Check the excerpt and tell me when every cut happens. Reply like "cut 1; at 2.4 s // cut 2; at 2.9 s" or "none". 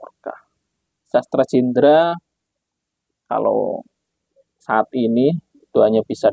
cut 1; at 1.1 s